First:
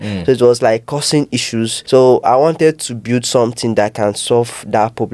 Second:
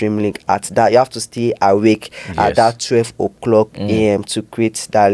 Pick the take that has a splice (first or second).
first